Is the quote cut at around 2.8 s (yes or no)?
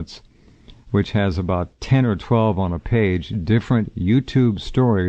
yes